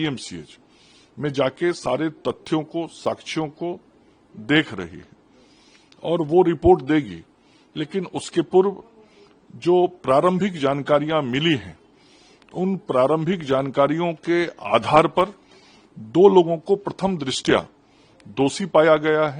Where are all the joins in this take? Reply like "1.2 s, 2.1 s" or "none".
none

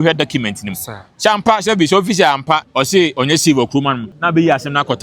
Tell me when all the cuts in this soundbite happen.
2.7 s, 4.1 s

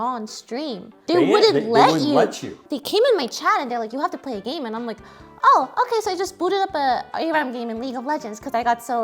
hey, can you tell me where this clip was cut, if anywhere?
1.0 s, 2.7 s

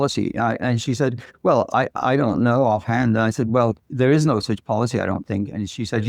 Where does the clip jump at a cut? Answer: 3.8 s

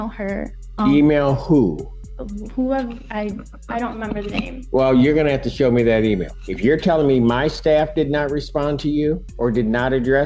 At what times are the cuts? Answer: 6.4 s, 9.3 s

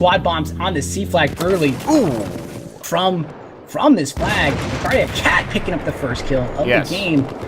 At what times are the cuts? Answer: 5.5 s

